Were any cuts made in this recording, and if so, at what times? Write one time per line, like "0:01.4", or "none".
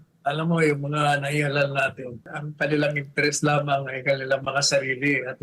0:02.4